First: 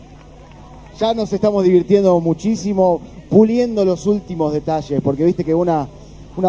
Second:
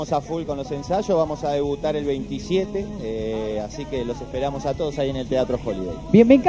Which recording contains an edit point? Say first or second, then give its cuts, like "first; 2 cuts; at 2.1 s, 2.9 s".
second; 1 cut; at 2.5 s